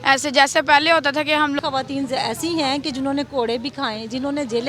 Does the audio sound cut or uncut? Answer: cut